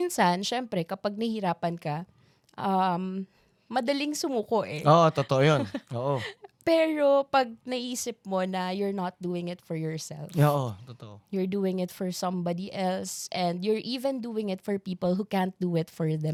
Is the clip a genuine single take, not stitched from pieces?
yes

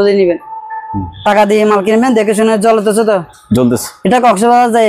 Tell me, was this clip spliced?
no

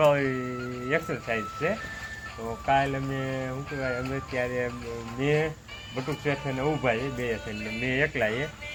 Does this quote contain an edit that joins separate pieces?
no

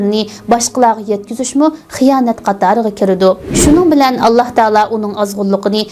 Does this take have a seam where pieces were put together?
yes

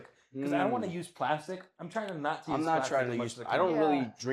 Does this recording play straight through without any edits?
yes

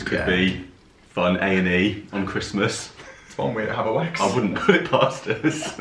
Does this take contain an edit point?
no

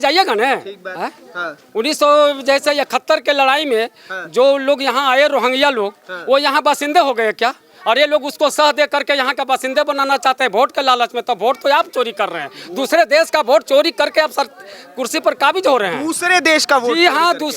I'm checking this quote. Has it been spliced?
no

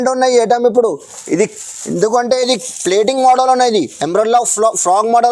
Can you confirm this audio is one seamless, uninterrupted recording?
yes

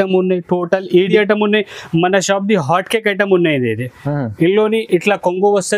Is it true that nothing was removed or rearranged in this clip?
no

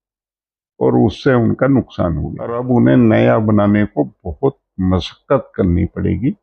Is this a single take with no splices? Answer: no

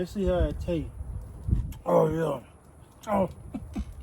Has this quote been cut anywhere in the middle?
yes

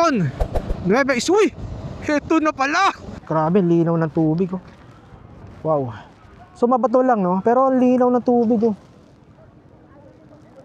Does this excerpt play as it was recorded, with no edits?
no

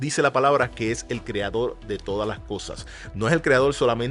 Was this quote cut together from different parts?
no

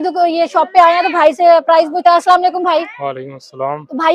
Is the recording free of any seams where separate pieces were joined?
yes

